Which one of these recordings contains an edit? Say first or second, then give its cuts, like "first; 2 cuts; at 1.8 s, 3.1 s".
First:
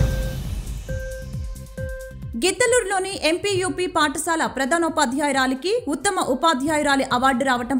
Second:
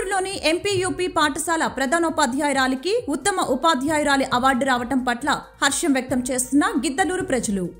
first; 1 cut; at 1.8 s